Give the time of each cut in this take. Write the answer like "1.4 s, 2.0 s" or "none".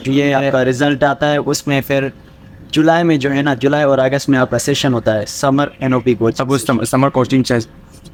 none

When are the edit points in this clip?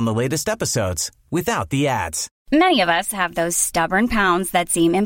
2.3 s

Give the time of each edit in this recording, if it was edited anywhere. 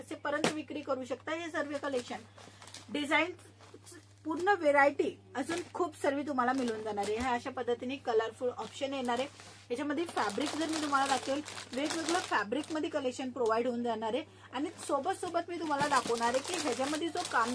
none

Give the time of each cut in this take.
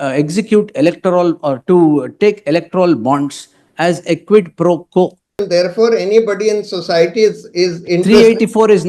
5.4 s

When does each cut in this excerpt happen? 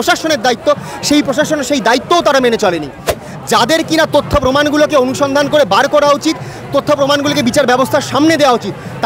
3.1 s

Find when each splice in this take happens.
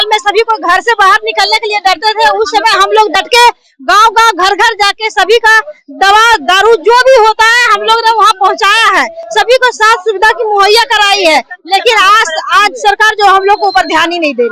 none

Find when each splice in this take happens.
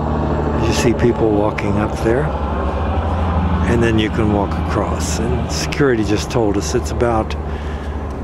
none

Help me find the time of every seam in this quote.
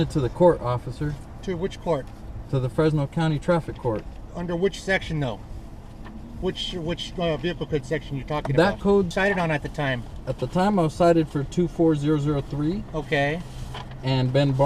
9.1 s

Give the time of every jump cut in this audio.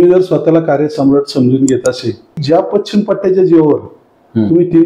2.4 s

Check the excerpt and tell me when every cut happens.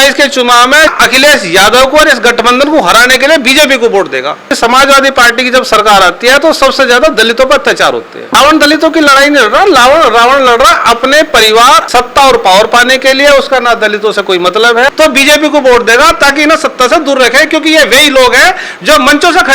0.9 s, 4.5 s, 8.2 s, 11.8 s, 14.9 s

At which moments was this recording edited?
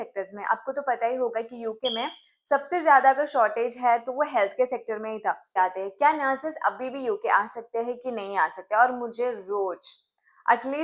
5.5 s

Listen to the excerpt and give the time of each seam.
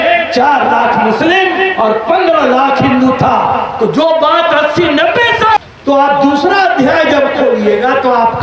5.6 s

